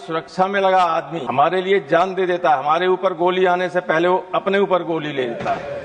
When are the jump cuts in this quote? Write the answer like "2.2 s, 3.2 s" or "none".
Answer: 1.2 s